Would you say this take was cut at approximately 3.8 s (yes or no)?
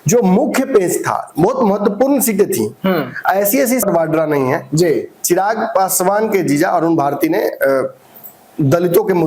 yes